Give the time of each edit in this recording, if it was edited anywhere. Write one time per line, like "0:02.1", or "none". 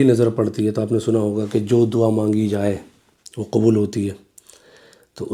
none